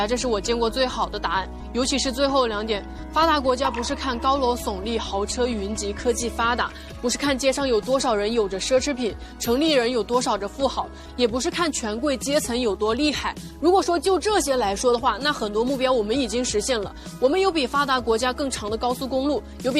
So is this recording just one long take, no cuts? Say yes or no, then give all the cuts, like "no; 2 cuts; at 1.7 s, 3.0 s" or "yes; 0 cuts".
yes; 0 cuts